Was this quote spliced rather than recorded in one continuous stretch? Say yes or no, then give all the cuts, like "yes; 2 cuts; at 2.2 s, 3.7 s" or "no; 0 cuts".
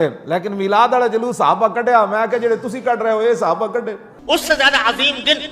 yes; 1 cut; at 4.0 s